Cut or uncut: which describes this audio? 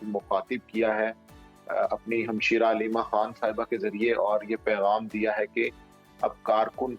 uncut